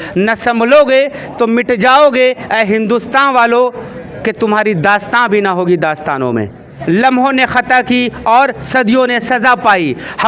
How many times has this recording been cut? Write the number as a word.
one